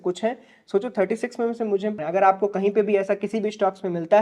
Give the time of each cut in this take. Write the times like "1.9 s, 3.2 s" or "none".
2.2 s